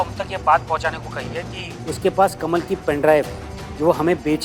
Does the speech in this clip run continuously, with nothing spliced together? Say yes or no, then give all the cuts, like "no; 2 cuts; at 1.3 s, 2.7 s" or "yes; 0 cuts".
yes; 0 cuts